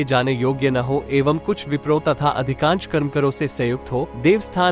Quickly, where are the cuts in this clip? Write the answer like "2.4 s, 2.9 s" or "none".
none